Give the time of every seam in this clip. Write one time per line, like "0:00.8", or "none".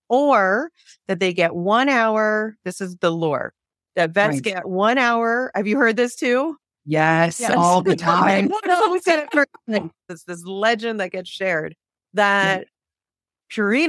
0:10.0